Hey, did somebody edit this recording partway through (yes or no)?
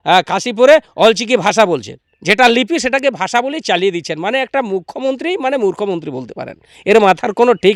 no